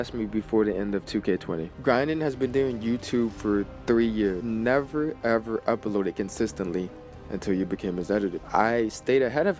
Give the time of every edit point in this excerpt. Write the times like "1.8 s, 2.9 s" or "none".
1.7 s, 3.7 s, 4.4 s, 8.4 s